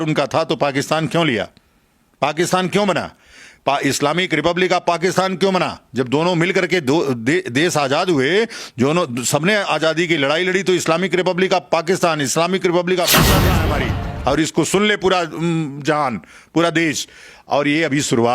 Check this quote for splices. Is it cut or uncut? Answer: cut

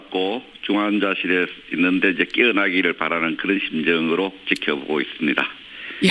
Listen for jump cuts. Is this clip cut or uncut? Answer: cut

